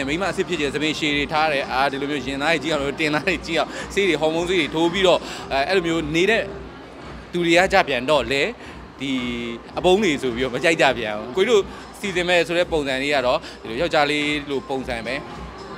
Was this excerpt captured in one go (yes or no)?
no